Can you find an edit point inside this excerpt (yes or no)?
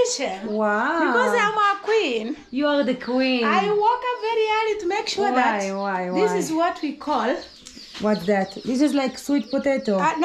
no